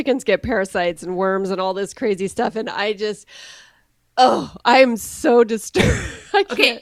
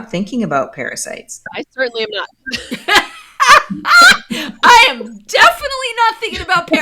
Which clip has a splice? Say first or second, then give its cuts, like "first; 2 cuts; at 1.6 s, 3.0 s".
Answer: second; 1 cut; at 1.5 s